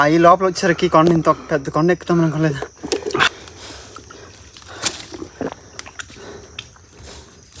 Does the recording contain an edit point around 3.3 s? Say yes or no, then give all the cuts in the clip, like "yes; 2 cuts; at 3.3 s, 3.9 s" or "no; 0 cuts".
yes; 2 cuts; at 3.3 s, 5.3 s